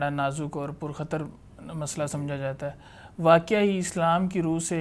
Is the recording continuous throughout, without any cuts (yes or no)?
yes